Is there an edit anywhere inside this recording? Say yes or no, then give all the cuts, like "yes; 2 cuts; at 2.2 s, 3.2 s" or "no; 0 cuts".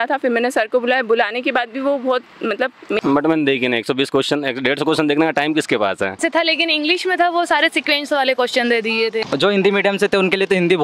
yes; 3 cuts; at 3.0 s, 6.2 s, 9.3 s